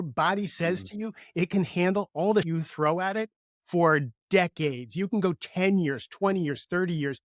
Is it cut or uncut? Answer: cut